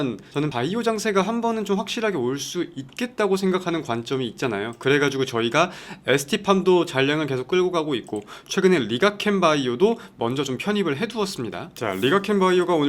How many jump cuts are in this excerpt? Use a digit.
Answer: 1